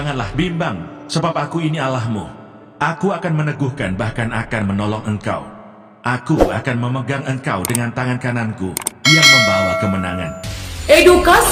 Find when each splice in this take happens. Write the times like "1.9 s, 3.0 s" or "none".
none